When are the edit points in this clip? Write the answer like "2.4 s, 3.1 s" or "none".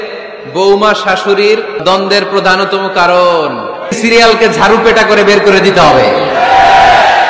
1.8 s, 4.0 s